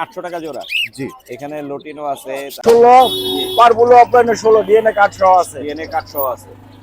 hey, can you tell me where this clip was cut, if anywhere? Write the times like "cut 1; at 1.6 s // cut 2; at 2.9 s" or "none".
cut 1; at 2.6 s